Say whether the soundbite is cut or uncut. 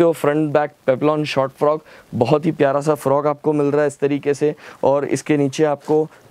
uncut